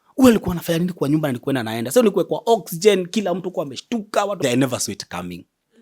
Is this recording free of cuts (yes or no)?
no